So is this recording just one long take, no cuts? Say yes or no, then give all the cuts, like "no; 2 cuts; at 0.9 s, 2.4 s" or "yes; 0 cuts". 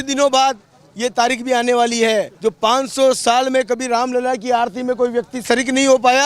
no; 1 cut; at 2.3 s